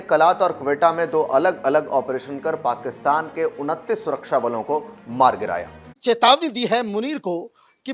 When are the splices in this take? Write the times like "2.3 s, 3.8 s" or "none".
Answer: 5.8 s